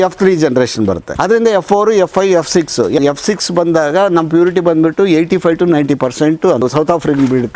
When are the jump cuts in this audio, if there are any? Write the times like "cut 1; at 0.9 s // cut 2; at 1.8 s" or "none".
cut 1; at 1.1 s // cut 2; at 3.0 s // cut 3; at 6.6 s